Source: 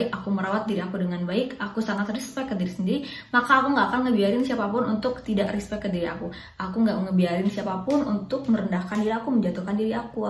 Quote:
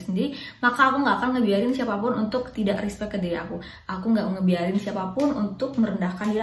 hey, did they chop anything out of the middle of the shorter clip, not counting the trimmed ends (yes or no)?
no